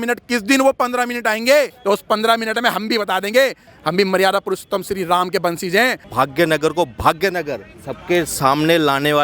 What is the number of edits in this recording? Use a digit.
3